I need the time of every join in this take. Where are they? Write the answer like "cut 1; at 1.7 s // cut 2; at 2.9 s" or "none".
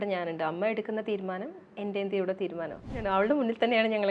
cut 1; at 3.0 s